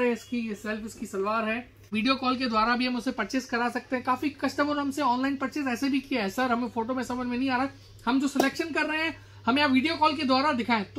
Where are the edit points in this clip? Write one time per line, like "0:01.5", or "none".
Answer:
0:01.8